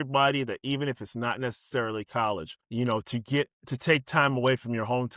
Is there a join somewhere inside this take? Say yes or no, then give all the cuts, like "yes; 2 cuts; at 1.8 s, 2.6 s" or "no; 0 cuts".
yes; 2 cuts; at 2.6 s, 3.6 s